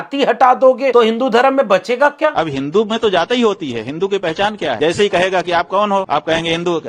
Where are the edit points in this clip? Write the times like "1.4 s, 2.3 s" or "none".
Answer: 0.9 s, 2.3 s, 4.8 s, 6.1 s